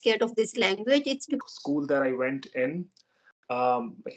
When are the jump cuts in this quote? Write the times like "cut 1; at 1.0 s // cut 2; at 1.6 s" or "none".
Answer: cut 1; at 1.4 s